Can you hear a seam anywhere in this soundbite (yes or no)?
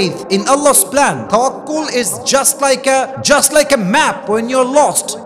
no